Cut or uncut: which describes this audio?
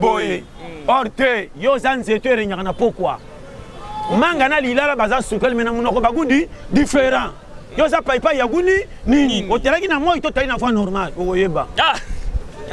uncut